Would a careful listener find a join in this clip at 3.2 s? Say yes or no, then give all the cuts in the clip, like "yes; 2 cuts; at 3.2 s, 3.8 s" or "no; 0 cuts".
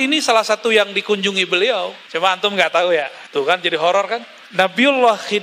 yes; 3 cuts; at 2.0 s, 3.2 s, 4.3 s